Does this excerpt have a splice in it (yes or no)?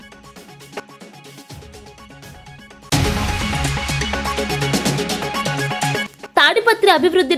no